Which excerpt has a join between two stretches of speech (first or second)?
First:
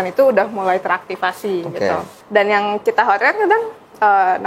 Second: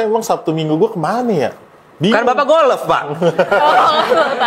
first